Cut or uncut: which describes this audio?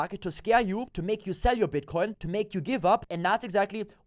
cut